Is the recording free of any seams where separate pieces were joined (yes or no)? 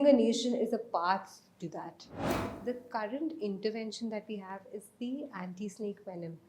no